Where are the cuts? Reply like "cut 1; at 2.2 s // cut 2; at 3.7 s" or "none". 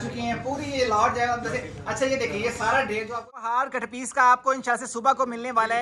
cut 1; at 3.4 s